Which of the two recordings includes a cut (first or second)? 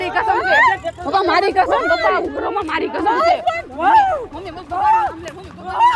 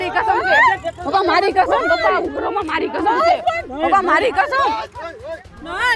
first